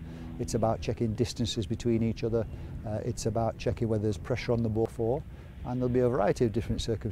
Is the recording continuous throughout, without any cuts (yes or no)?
no